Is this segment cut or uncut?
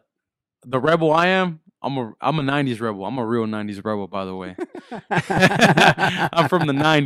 uncut